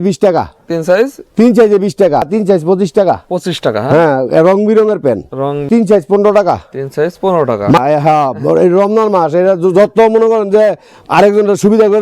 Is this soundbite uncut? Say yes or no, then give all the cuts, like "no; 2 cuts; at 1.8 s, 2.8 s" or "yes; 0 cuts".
no; 3 cuts; at 2.3 s, 5.7 s, 7.8 s